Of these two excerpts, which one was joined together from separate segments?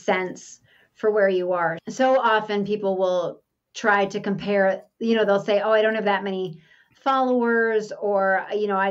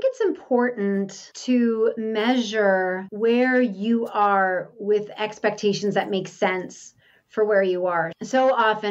second; 3 cuts; at 1.3 s, 2.0 s, 3.1 s

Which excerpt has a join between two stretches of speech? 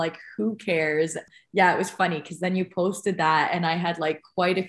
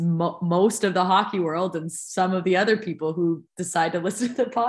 first; 1 cut; at 1.3 s

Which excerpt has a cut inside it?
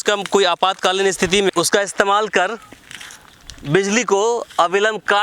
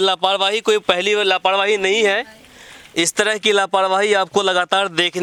first; 1 cut; at 1.5 s

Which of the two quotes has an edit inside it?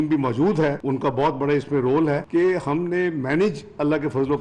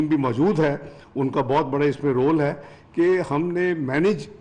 first; 2 cuts; at 0.8 s, 2.2 s

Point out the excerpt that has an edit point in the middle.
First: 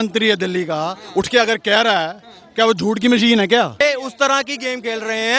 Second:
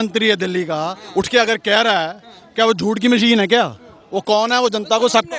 first; 1 cut; at 3.8 s

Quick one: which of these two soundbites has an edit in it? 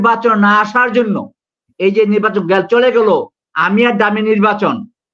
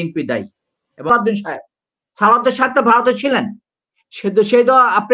second; 1 cut; at 1.1 s

